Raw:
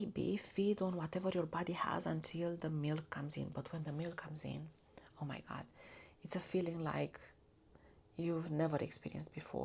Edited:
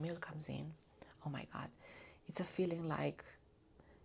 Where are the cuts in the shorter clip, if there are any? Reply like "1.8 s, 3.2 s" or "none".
none